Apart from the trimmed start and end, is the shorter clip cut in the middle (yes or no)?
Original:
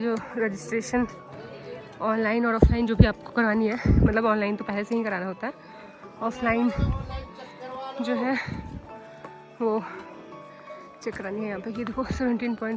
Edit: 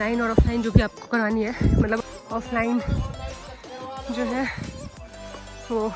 yes